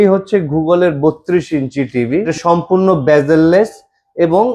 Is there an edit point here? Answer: yes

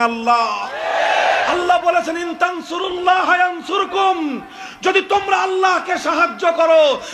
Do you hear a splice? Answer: no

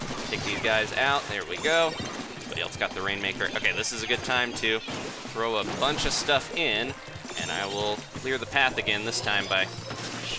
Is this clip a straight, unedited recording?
yes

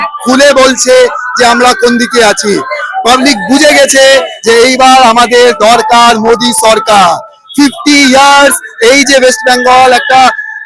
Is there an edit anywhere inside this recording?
no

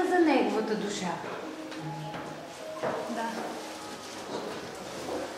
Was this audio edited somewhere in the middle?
no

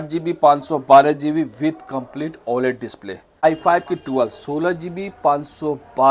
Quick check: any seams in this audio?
yes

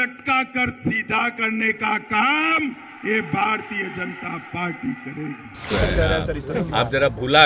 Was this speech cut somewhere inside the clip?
yes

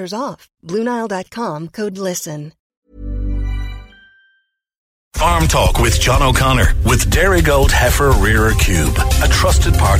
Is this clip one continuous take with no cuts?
no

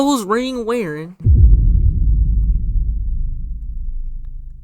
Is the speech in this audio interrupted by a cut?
yes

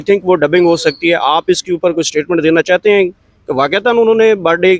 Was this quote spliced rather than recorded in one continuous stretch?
no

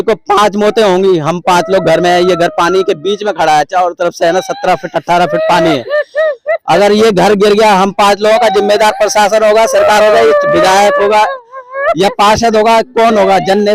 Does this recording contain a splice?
no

